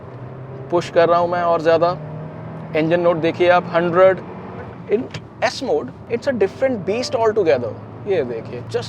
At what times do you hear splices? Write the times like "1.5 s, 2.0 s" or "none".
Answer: 4.8 s